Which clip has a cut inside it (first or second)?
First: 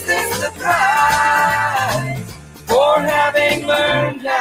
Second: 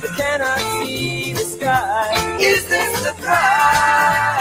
second